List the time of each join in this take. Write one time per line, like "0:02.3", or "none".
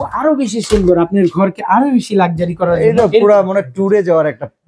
none